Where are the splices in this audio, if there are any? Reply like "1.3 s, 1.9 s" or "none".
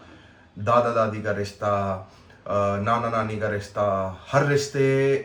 none